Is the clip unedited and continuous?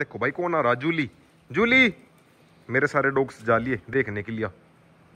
yes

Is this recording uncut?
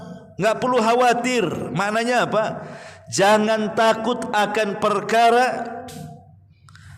yes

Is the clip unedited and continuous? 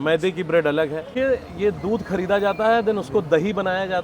no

